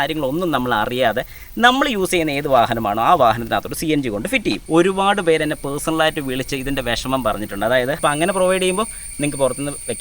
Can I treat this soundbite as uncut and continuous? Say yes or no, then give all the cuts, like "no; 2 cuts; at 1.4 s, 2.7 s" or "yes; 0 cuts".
no; 2 cuts; at 4.6 s, 8.0 s